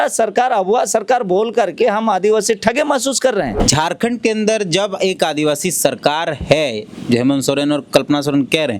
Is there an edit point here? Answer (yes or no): yes